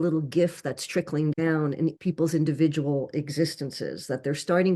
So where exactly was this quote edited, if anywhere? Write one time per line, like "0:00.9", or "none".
0:02.0